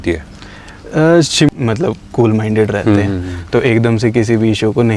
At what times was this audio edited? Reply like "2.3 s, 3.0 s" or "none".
1.5 s

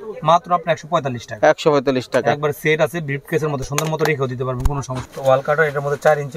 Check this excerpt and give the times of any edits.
5.0 s

